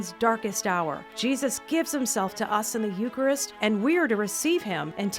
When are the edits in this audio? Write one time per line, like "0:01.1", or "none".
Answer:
0:01.1